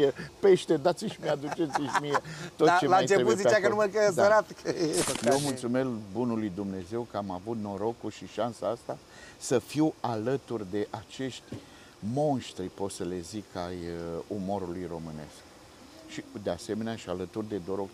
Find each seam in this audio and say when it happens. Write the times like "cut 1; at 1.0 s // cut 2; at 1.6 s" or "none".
cut 1; at 5.1 s